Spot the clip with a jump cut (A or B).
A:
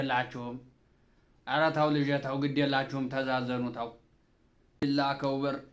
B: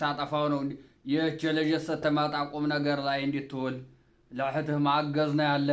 A